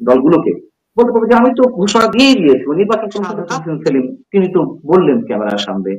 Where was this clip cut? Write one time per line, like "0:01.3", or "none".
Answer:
0:03.4